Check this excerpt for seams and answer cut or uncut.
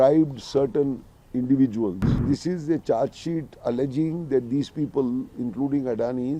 cut